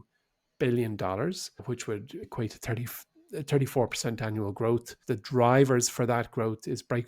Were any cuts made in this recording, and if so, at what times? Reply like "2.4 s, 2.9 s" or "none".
2.0 s, 5.0 s